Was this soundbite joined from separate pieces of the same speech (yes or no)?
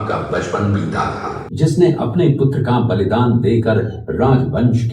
yes